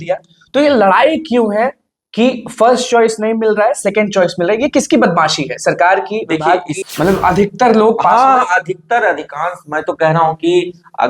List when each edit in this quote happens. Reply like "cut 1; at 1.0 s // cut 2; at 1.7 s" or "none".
cut 1; at 6.8 s